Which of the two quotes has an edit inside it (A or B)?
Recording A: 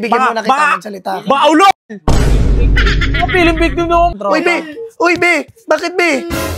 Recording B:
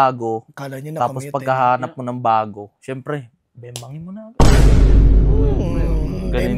A